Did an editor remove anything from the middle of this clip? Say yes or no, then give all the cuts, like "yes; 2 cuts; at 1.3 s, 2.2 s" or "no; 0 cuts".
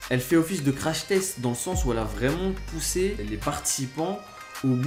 no; 0 cuts